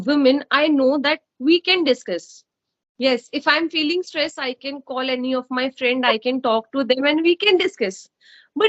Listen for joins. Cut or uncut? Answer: uncut